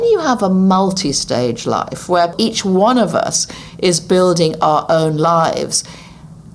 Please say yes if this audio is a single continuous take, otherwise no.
no